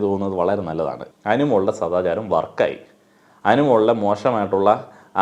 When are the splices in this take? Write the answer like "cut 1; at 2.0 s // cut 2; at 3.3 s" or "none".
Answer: cut 1; at 1.0 s